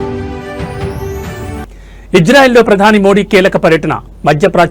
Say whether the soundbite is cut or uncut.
cut